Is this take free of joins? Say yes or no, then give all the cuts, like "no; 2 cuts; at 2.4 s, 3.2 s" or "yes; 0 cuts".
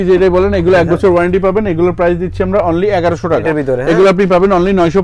no; 1 cut; at 3.4 s